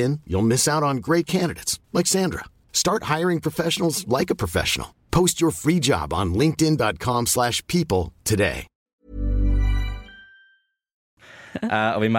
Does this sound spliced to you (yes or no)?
yes